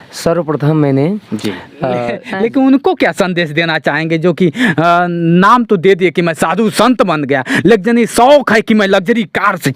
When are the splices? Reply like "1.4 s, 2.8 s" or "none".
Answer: 2.0 s